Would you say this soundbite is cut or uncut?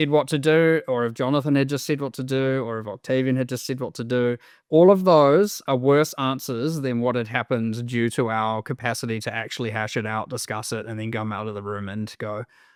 uncut